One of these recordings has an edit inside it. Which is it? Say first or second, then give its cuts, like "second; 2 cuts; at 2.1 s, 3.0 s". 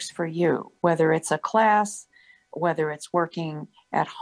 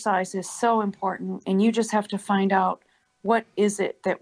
first; 1 cut; at 2.5 s